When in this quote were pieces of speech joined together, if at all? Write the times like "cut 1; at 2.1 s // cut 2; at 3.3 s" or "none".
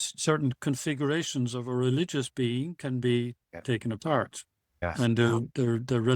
cut 1; at 4.8 s